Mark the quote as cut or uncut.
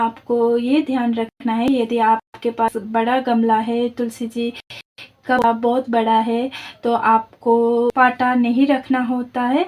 cut